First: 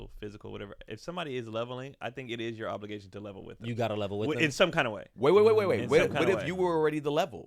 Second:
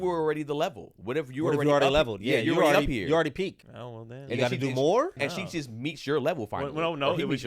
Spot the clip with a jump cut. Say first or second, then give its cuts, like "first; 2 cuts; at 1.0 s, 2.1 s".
second; 2 cuts; at 3.7 s, 5.2 s